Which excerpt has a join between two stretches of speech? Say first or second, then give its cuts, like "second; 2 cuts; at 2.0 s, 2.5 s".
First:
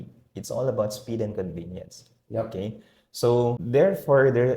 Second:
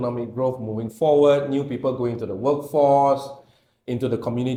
first; 1 cut; at 3.6 s